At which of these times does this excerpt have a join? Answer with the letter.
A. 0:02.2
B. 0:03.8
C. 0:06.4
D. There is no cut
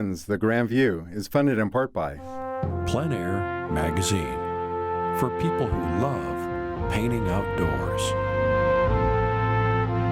A